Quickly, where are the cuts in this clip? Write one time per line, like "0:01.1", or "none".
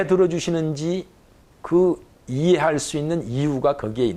none